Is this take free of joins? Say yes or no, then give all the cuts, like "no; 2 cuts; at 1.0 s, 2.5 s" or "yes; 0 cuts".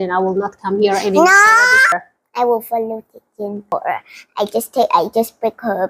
no; 2 cuts; at 1.9 s, 3.7 s